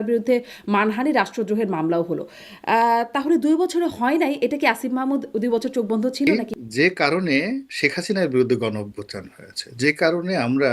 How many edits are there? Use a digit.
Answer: 1